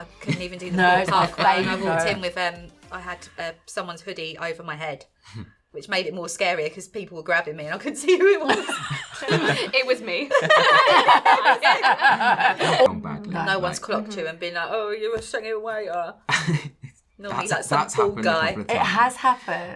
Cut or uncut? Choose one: cut